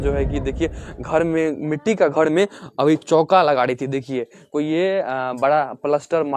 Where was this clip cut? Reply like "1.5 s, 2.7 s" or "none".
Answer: none